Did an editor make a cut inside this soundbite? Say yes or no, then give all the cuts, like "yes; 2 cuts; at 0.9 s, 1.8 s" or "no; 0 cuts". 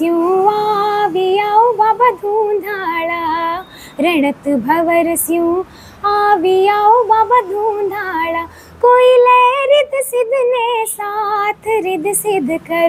no; 0 cuts